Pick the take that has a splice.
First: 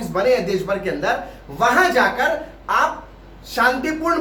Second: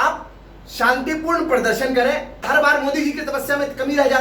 second; 1 cut; at 2.4 s

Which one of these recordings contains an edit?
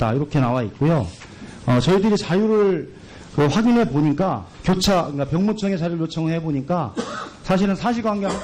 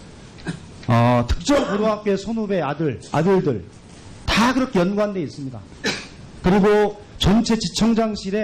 second; 1 cut; at 4.5 s

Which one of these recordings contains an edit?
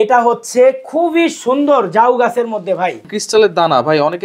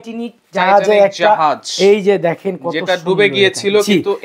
first; 1 cut; at 3.1 s

